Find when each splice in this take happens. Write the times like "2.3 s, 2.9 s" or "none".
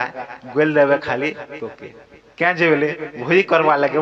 none

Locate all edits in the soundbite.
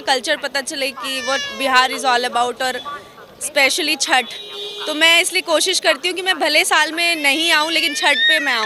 none

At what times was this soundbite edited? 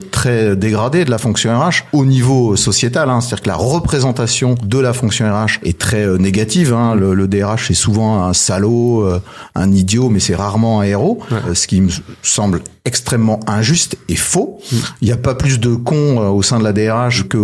none

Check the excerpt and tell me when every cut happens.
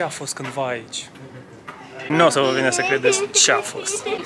none

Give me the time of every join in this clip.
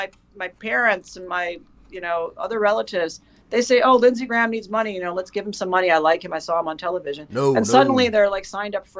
none

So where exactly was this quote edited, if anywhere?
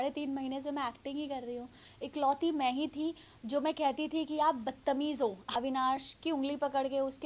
1.8 s, 5.4 s

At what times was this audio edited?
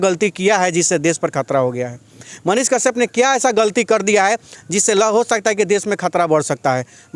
none

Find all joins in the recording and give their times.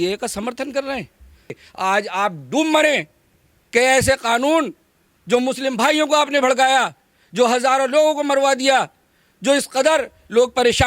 1.5 s

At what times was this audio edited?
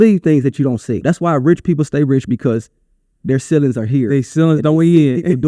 1.0 s

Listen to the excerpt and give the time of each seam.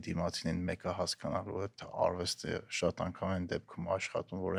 none

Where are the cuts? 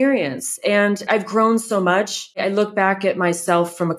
1.1 s, 2.4 s

